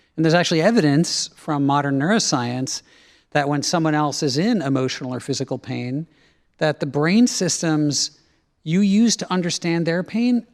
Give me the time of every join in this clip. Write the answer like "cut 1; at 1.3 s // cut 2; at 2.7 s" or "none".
none